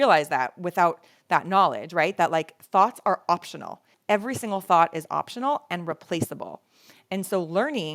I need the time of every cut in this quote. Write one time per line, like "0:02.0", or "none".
0:03.9